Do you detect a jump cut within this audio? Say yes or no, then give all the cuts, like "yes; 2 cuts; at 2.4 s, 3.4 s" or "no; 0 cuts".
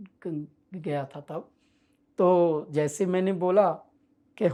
no; 0 cuts